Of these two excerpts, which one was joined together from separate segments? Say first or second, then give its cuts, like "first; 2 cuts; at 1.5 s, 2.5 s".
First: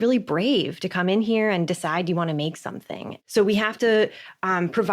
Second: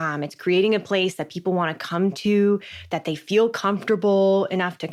first; 1 cut; at 3.1 s